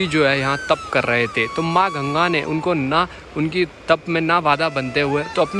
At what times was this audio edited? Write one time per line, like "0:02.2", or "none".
none